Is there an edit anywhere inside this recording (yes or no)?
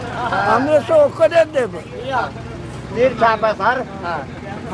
no